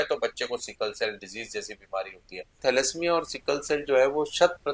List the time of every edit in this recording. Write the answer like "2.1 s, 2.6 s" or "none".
2.5 s